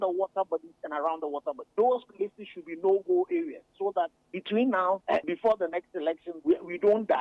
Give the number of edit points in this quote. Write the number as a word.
three